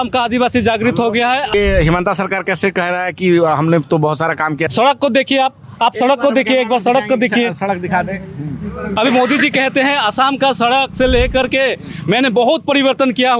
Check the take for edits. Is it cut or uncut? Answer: cut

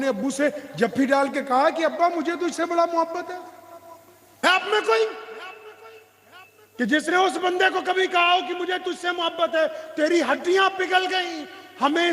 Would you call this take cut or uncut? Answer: cut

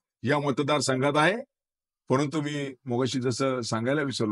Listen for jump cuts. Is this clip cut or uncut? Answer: uncut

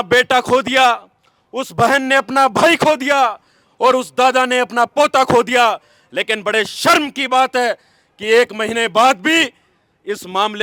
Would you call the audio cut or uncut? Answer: uncut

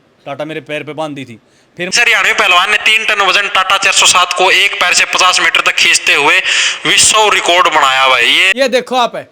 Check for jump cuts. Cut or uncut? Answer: cut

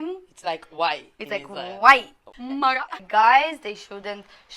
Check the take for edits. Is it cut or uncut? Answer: cut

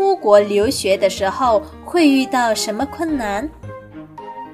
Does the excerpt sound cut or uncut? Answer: cut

